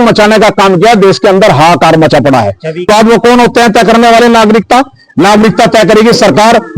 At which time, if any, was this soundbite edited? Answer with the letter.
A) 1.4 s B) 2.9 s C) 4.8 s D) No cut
B